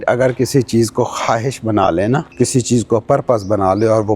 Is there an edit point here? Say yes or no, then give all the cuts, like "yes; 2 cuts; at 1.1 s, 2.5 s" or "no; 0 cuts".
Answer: yes; 1 cut; at 2.3 s